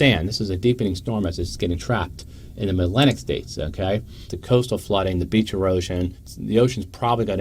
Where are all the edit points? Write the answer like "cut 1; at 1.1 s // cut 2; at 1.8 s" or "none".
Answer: cut 1; at 4.2 s // cut 2; at 6.3 s